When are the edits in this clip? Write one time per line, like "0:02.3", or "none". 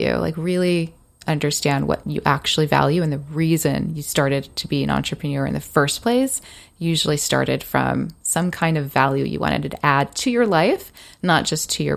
0:02.0